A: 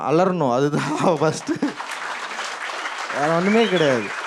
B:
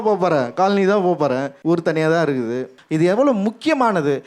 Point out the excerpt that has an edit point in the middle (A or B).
B